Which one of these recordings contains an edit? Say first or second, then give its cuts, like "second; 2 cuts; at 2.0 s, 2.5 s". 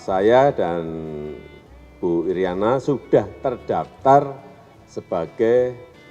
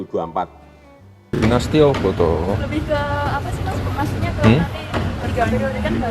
second; 1 cut; at 1.2 s